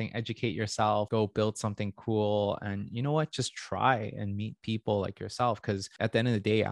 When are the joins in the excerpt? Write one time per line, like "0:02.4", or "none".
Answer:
0:01.1
0:05.9